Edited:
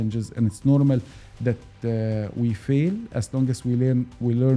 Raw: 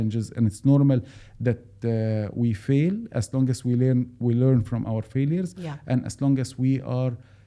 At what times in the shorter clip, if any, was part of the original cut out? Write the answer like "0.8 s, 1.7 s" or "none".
none

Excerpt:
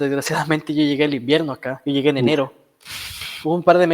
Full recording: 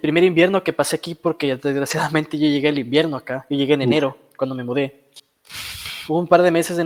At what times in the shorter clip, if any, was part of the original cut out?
2.6 s

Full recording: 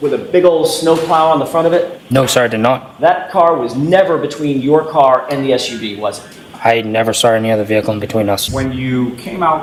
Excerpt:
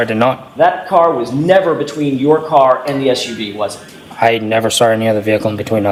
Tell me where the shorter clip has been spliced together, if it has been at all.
none

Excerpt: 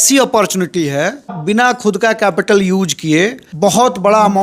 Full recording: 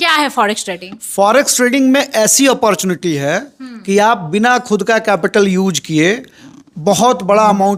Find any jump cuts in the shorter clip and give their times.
1.4 s, 3.4 s

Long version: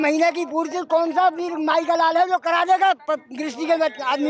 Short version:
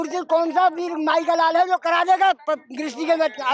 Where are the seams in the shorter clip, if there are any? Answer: none

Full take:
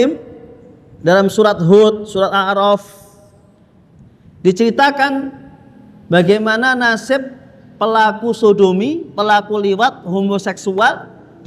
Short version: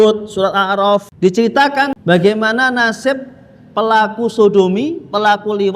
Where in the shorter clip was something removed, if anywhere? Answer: 1.1 s, 2.0 s

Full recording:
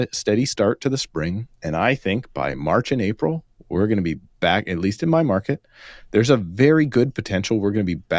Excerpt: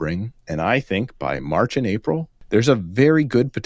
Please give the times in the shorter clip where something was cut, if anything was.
2.3 s

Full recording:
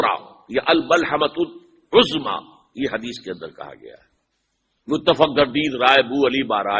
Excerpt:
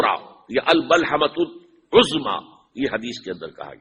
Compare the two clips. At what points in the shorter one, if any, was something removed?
none

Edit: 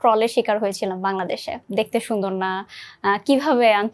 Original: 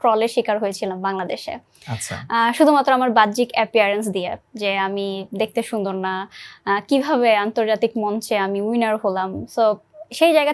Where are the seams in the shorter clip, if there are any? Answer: 1.6 s

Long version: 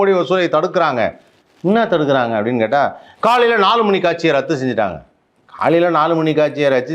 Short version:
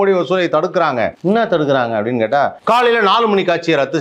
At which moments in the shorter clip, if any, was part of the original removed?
1.2 s, 2.6 s

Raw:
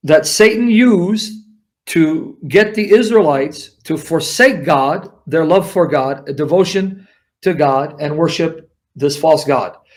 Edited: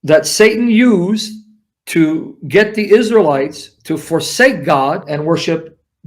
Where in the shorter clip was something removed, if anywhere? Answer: 5.1 s

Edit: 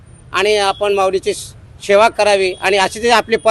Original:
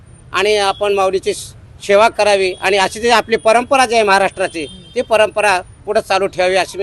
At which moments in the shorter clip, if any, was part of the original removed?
none

